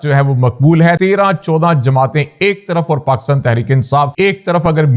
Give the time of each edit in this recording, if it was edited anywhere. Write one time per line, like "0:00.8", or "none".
0:01.0
0:04.1